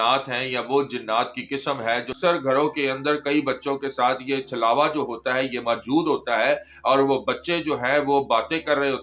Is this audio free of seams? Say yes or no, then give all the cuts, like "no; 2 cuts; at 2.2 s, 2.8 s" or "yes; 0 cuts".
no; 1 cut; at 2.1 s